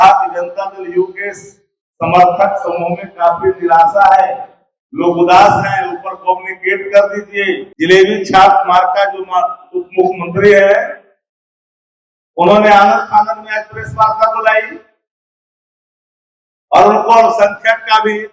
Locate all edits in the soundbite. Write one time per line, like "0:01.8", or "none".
0:07.7